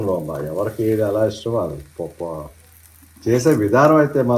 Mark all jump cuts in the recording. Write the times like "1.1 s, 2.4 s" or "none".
none